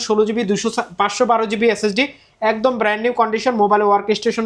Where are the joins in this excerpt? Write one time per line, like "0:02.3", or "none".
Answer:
none